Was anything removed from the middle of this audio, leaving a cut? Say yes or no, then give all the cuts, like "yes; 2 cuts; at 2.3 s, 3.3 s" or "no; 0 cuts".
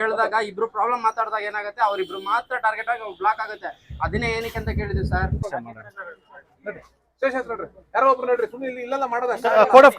yes; 1 cut; at 5.4 s